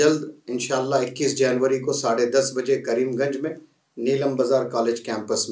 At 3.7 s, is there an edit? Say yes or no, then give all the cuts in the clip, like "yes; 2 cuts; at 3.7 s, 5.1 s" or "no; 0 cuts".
no; 0 cuts